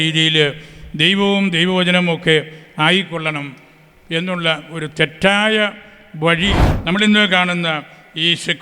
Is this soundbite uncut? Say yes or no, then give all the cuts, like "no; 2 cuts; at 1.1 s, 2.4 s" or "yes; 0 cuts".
no; 1 cut; at 6.7 s